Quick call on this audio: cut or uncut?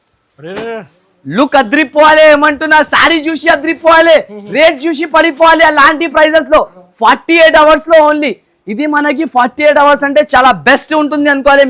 uncut